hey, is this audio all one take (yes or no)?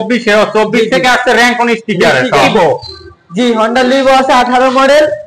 no